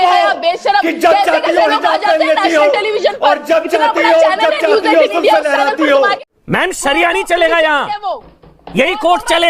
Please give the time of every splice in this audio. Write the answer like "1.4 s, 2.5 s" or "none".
6.3 s